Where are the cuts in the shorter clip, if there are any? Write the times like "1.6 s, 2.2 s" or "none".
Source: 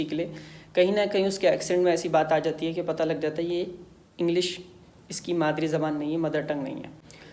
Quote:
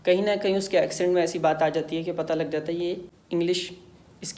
3.1 s